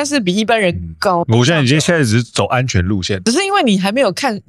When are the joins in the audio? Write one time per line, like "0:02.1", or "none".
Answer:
0:01.2
0:03.1